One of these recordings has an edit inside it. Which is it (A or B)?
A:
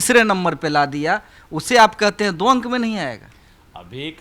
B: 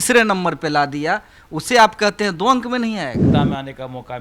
B